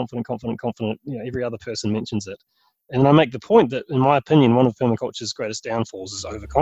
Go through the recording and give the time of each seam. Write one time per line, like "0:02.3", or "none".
none